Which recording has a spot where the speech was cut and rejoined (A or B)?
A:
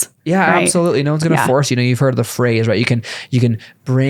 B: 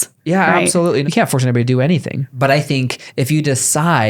B